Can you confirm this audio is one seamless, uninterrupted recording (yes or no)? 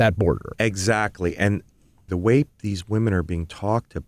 no